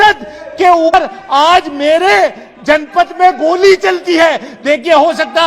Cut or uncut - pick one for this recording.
cut